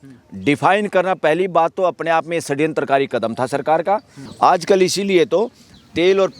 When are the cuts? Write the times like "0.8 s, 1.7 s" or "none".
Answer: 4.2 s